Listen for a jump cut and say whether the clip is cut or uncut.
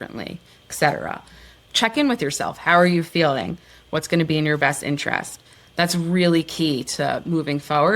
cut